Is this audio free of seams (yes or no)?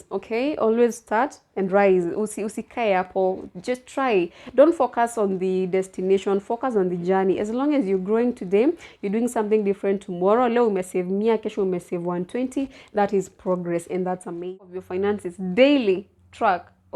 no